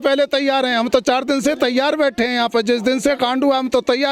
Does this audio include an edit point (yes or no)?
no